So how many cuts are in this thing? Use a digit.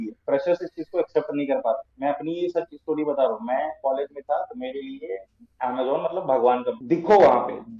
1